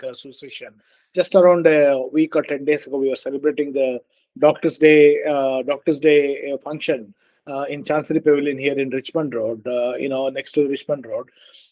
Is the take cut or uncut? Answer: uncut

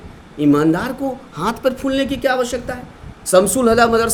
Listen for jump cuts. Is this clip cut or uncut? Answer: uncut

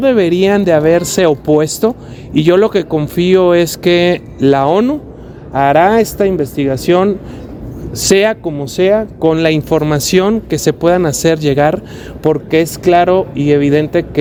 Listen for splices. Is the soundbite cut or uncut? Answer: uncut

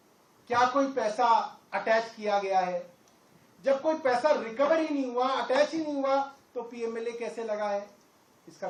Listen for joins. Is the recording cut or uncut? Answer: uncut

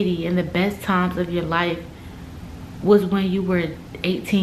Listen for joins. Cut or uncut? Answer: uncut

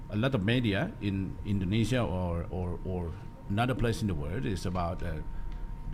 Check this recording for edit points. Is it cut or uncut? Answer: uncut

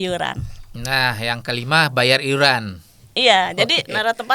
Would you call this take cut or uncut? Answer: uncut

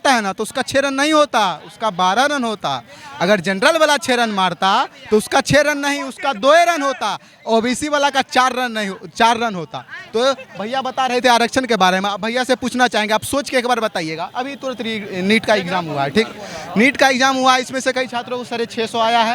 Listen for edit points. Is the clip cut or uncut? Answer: uncut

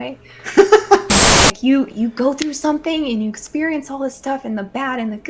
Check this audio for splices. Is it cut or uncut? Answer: cut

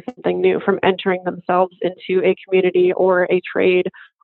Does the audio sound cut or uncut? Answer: uncut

